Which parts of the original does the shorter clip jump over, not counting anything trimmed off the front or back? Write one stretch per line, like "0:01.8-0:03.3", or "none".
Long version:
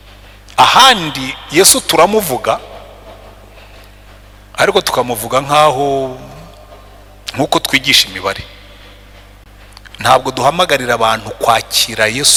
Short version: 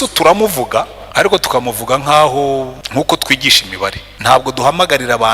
0:02.7-0:04.4
0:06.2-0:07.2
0:08.5-0:09.9